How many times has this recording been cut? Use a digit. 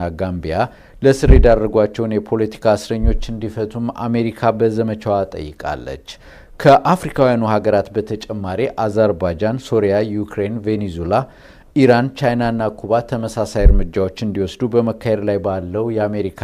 1